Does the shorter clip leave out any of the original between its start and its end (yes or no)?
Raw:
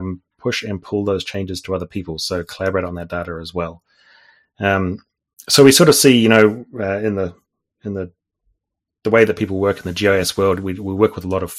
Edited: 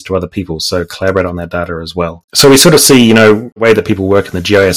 yes